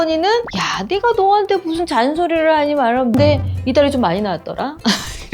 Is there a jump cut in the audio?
yes; 1 cut; at 3.5 s

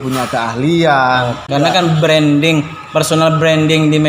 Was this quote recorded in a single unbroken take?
no; 1 cut; at 1.5 s

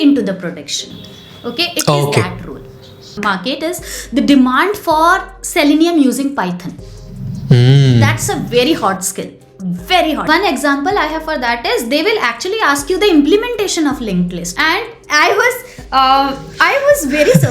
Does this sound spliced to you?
yes; 2 cuts; at 3.1 s, 10.2 s

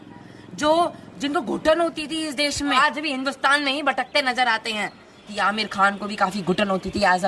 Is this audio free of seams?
no; 2 cuts; at 2.8 s, 5.2 s

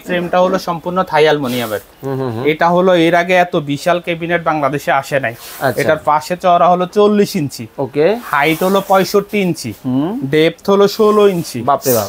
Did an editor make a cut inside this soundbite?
yes; 1 cut; at 2.0 s

